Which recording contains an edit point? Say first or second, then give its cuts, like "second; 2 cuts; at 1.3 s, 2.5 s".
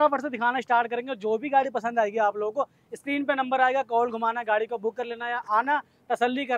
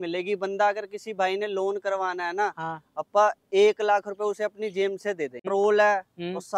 second; 1 cut; at 5.4 s